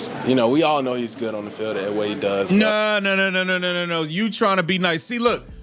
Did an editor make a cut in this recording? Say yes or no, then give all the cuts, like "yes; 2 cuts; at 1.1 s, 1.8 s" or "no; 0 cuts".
no; 0 cuts